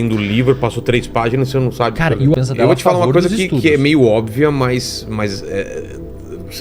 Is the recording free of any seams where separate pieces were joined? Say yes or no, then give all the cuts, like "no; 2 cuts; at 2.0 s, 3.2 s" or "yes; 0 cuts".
no; 1 cut; at 2.3 s